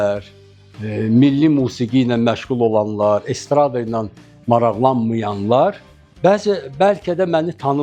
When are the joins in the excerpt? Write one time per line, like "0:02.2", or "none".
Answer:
none